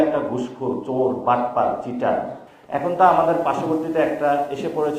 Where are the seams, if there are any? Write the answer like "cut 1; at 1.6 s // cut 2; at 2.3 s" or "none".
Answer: cut 1; at 2.4 s